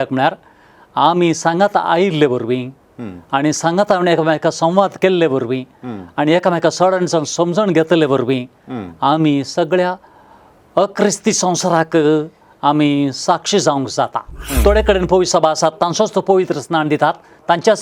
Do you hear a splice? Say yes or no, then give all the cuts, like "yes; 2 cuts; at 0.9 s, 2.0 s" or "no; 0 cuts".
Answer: yes; 1 cut; at 14.4 s